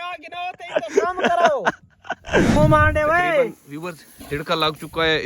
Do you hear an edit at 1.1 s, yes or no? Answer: no